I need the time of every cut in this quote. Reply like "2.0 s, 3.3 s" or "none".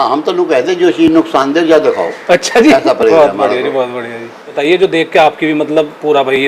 4.5 s